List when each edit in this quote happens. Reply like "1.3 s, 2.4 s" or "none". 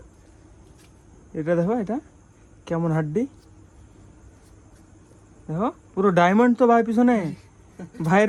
none